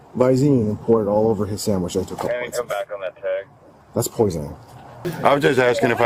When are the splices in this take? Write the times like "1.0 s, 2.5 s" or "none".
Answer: 5.1 s